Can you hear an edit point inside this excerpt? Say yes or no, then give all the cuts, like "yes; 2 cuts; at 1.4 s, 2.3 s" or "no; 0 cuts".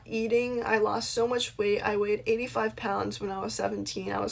no; 0 cuts